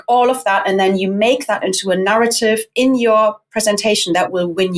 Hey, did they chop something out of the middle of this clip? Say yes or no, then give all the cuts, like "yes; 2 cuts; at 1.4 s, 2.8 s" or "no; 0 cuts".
no; 0 cuts